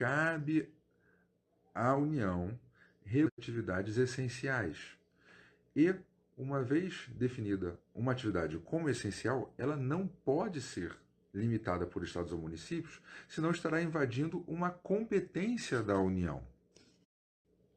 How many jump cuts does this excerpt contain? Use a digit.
1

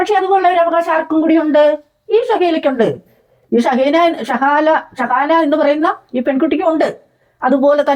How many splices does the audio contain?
0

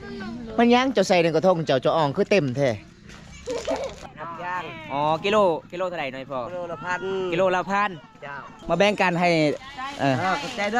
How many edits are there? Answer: 2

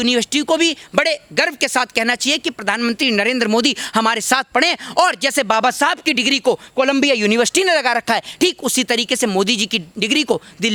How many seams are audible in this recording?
0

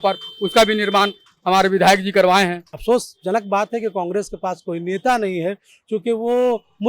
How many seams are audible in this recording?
1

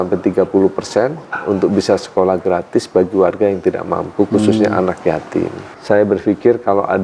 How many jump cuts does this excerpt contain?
1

